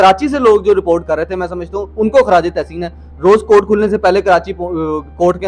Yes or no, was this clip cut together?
no